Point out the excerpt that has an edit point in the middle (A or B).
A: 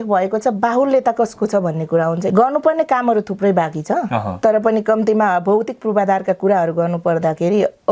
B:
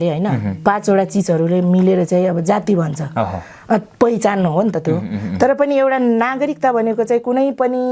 A